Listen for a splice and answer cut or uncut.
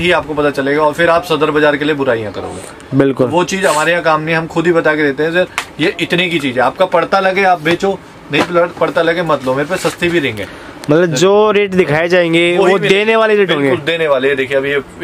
uncut